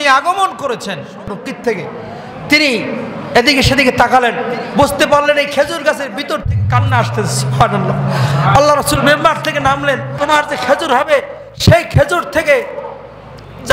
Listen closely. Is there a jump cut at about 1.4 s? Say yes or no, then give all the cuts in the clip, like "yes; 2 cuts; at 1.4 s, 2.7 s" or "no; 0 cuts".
yes; 2 cuts; at 1.4 s, 10.2 s